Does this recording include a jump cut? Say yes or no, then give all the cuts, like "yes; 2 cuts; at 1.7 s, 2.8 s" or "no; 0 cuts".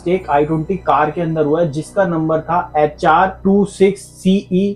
no; 0 cuts